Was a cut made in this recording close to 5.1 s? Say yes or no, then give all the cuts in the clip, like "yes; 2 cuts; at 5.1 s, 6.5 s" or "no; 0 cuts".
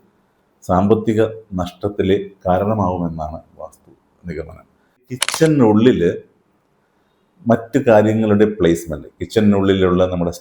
yes; 1 cut; at 5.1 s